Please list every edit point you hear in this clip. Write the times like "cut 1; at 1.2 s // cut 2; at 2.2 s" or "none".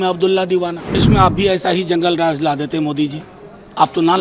cut 1; at 1.0 s